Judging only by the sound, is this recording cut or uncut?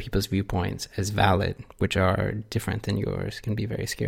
uncut